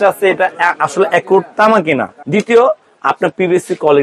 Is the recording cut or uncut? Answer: cut